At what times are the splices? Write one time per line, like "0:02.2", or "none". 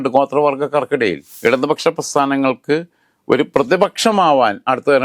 0:01.3